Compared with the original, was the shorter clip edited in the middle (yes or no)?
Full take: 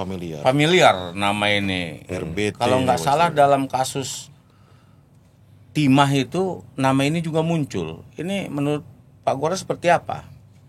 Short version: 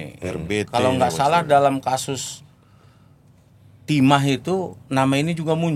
no